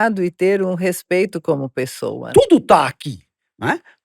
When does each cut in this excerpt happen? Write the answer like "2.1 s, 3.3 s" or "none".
2.2 s